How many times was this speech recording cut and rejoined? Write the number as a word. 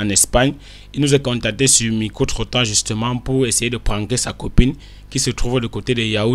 zero